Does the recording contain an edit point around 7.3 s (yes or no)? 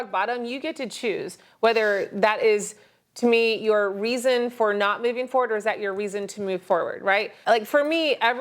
yes